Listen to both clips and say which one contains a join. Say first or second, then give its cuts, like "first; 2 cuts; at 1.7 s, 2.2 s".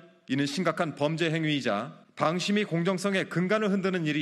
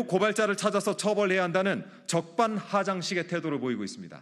first; 1 cut; at 2.0 s